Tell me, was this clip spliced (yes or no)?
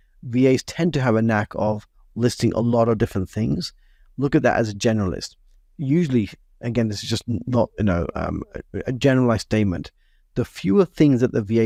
no